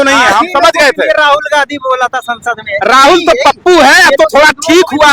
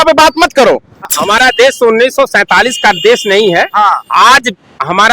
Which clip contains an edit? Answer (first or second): second